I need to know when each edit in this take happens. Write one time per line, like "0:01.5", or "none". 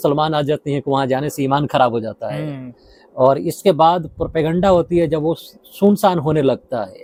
none